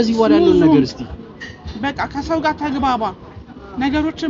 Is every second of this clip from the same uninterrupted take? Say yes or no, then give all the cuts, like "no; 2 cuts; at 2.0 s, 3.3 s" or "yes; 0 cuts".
yes; 0 cuts